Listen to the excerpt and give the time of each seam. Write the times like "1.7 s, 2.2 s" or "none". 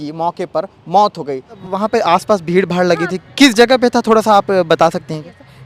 1.5 s